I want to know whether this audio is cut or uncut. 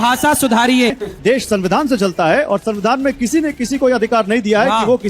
cut